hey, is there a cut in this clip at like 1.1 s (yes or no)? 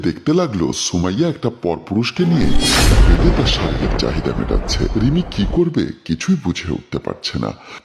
no